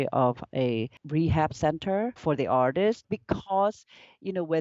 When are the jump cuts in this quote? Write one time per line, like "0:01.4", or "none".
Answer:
0:01.0
0:02.2
0:03.0